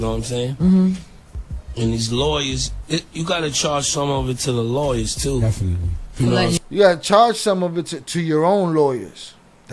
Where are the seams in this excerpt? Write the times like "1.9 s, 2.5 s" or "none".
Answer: none